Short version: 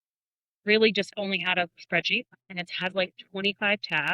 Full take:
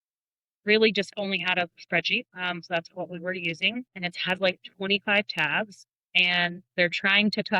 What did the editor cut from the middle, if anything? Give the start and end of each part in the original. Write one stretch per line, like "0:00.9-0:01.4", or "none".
0:02.4-0:03.9